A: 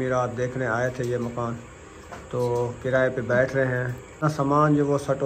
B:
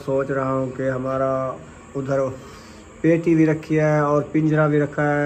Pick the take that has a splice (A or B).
A